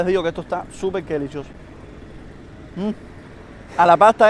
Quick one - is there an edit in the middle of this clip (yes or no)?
no